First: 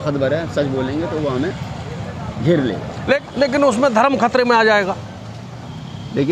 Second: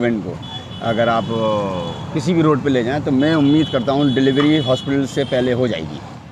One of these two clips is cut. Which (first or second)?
first